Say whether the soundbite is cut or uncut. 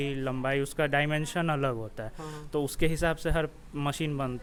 uncut